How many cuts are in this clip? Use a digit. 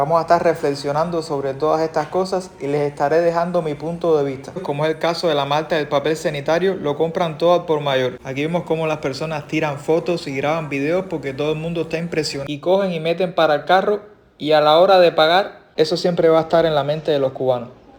4